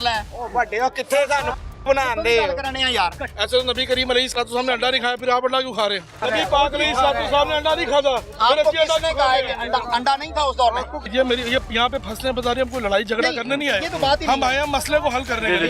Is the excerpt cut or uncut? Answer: cut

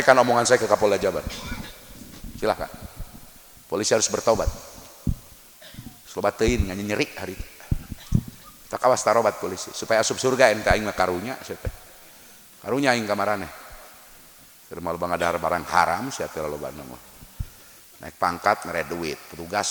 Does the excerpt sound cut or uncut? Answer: uncut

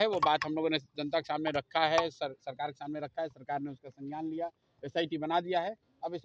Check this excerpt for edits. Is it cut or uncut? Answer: uncut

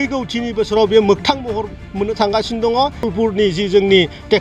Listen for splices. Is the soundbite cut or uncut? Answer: cut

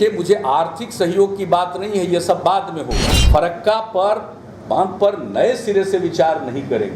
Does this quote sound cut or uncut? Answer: cut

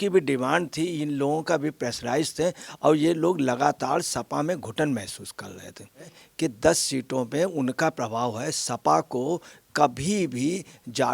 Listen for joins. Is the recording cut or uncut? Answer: cut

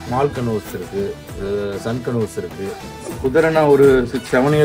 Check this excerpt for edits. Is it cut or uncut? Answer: cut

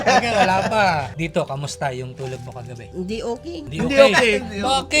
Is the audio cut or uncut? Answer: cut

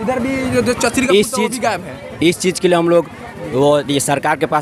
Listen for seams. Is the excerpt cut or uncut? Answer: uncut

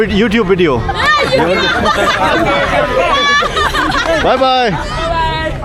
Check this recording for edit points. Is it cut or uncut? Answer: uncut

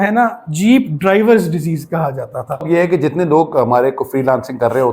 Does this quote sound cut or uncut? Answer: cut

